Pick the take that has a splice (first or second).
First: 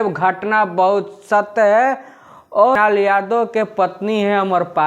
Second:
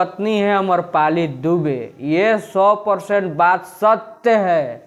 first